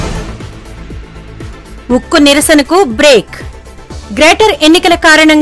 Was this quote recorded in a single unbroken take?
no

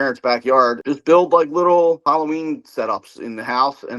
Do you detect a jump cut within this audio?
yes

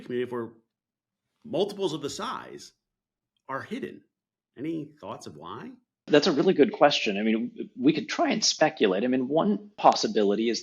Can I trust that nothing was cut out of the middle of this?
no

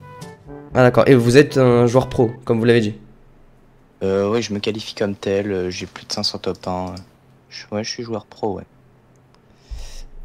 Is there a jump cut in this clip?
no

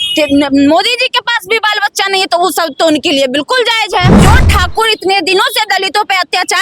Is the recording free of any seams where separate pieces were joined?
no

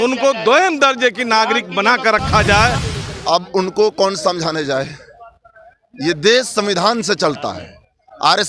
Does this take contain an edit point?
yes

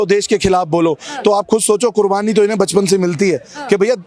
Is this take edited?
no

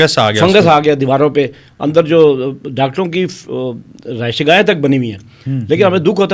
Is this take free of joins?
yes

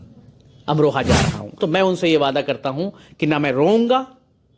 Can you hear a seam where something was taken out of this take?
yes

